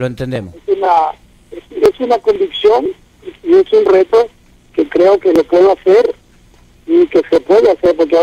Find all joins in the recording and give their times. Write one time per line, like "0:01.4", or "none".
0:05.8